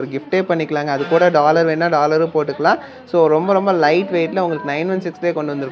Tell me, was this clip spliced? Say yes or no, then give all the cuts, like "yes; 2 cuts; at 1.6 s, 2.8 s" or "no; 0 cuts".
no; 0 cuts